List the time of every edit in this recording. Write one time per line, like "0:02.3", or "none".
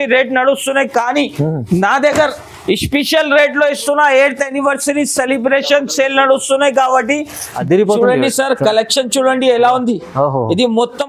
0:07.5